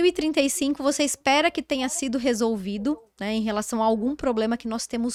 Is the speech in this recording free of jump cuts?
yes; 0 cuts

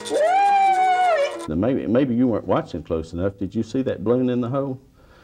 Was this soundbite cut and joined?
yes; 1 cut; at 1.5 s

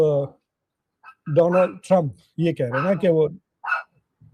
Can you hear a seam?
no; 0 cuts

